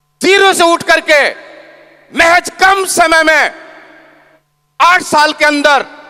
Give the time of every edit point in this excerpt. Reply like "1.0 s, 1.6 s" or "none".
none

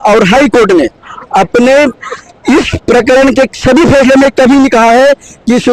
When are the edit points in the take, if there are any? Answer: none

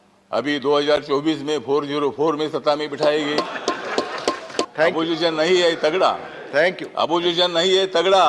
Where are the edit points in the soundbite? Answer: 4.7 s

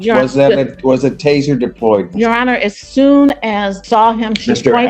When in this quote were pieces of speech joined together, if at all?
3.8 s

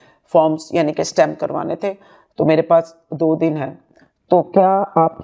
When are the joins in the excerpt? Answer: none

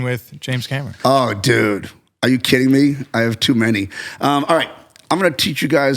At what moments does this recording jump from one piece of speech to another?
0.9 s

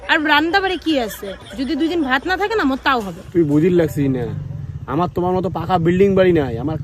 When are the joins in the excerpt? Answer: 3.2 s

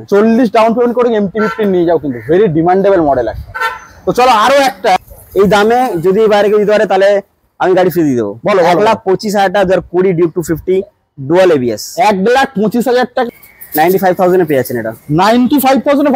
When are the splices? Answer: 5.0 s, 13.3 s

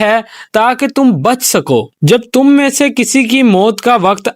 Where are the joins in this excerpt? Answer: 1.9 s

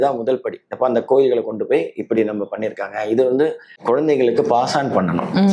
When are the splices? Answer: 3.7 s

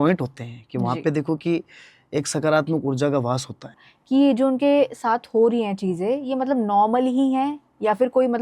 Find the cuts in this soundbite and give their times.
3.7 s

